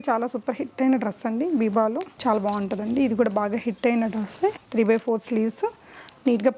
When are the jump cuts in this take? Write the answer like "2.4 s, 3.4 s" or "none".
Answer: 2.1 s, 4.6 s